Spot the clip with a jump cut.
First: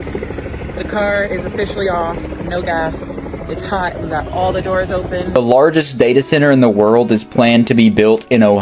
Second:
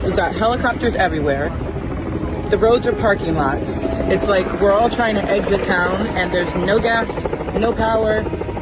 first; 1 cut; at 5.4 s

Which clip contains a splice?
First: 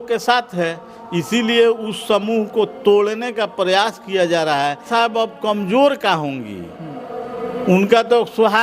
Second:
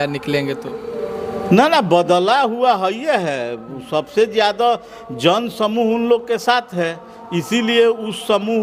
first; 1 cut; at 4.9 s

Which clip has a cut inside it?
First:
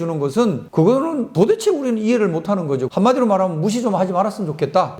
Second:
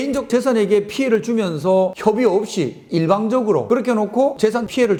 first; 1 cut; at 2.9 s

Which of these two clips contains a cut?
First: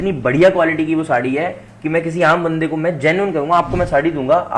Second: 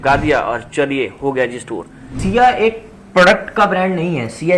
second; 1 cut; at 2.2 s

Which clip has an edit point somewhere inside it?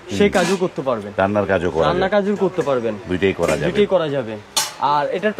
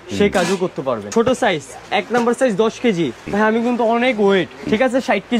second; 3 cuts; at 1.0 s, 3.2 s, 4.6 s

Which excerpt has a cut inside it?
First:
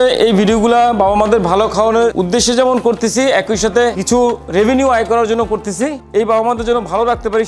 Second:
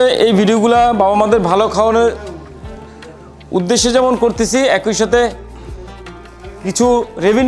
first; 3 cuts; at 2.1 s, 4.0 s, 6.0 s

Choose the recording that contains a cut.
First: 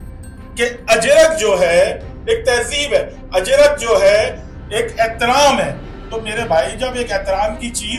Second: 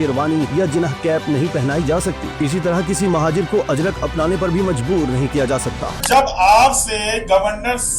second; 1 cut; at 6.0 s

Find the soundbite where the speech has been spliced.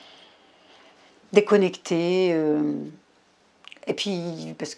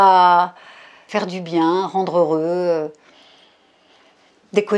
second; 1 cut; at 1.0 s

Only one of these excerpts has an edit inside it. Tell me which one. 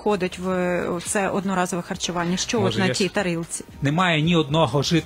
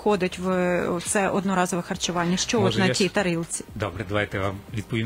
first; 1 cut; at 3.7 s

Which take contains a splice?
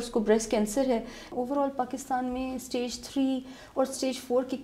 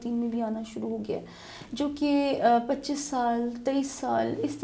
first; 1 cut; at 1.2 s

